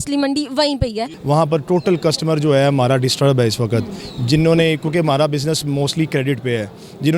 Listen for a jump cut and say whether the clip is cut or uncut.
cut